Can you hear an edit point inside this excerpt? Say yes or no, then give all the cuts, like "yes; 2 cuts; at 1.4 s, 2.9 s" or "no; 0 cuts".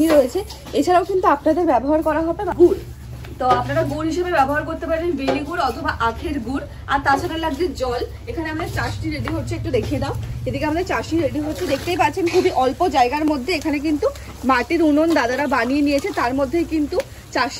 no; 0 cuts